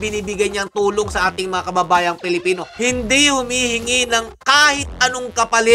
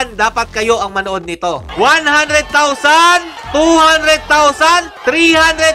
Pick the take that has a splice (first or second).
second